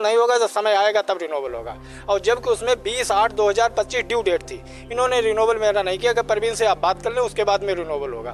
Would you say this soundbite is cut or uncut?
uncut